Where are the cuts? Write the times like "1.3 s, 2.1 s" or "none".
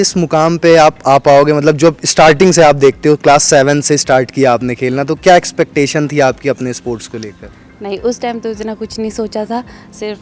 none